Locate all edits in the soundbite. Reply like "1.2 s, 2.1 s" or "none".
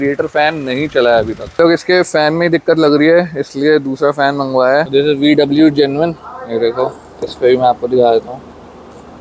1.6 s, 4.9 s